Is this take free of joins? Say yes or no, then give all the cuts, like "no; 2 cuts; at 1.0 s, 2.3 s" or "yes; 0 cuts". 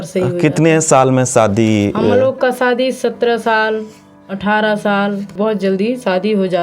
no; 1 cut; at 5.4 s